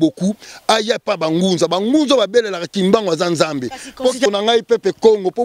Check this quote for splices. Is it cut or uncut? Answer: cut